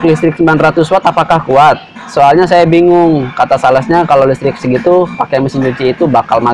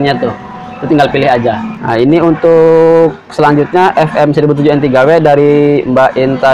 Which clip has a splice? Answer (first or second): second